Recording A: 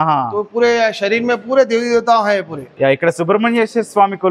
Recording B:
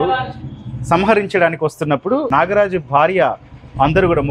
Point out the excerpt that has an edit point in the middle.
A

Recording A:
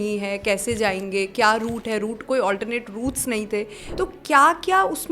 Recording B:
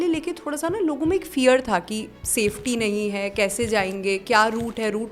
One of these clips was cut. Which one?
A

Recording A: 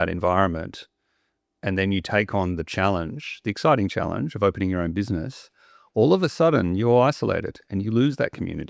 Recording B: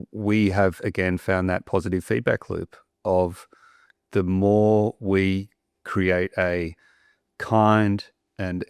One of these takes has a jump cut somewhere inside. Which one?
B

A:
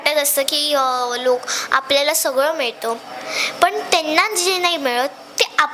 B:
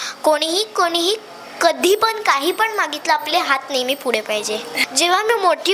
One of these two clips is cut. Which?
B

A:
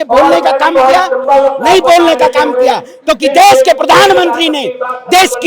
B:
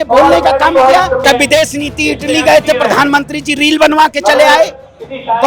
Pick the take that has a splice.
B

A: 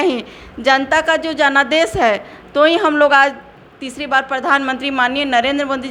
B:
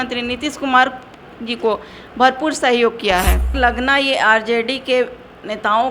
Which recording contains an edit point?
B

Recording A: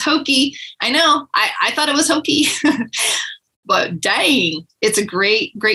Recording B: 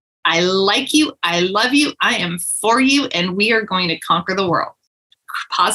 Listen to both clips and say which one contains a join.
B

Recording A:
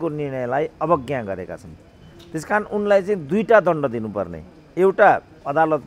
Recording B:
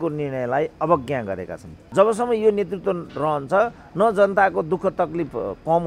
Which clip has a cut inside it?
B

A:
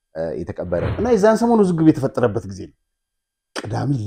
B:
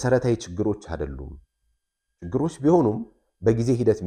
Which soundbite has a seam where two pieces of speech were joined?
A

